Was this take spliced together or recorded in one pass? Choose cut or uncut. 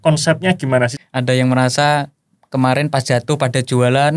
cut